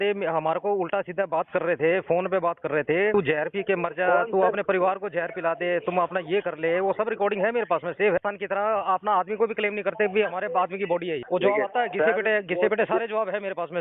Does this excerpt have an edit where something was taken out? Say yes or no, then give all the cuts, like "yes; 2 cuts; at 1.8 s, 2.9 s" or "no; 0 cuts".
yes; 3 cuts; at 3.1 s, 8.2 s, 11.2 s